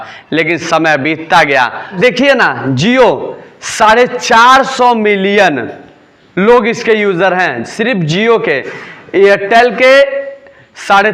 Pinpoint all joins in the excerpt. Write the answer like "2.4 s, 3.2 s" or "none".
2.0 s